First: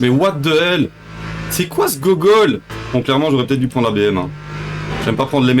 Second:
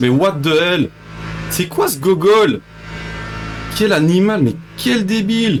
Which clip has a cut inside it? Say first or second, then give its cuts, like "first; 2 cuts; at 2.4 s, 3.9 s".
first; 1 cut; at 2.7 s